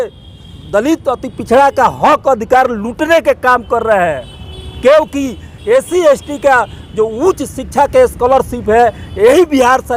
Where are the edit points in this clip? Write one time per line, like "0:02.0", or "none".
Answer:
none